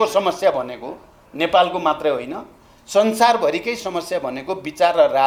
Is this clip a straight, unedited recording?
yes; 0 cuts

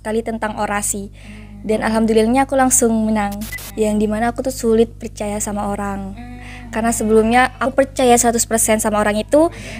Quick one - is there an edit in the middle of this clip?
yes; 2 cuts; at 3.5 s, 7.6 s

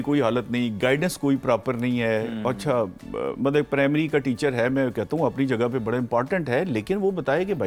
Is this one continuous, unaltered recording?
yes; 0 cuts

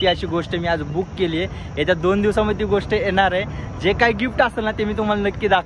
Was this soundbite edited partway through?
no; 0 cuts

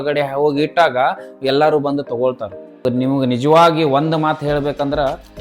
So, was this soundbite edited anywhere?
yes; 1 cut; at 2.8 s

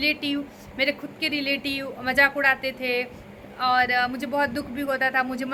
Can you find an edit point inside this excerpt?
no; 0 cuts

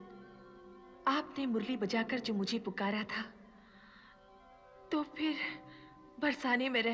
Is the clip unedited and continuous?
yes; 0 cuts

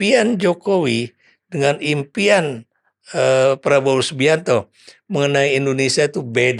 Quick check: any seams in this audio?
no; 0 cuts

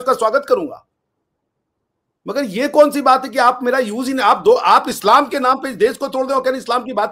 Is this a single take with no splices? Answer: yes; 0 cuts

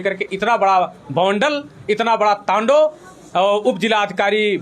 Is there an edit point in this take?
no; 0 cuts

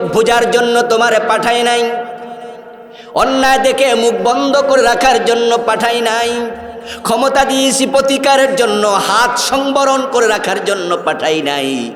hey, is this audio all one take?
yes; 0 cuts

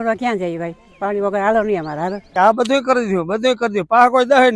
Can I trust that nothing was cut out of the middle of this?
no; 1 cut; at 2.3 s

